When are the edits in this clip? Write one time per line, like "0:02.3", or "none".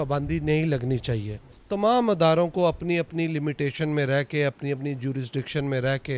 0:01.6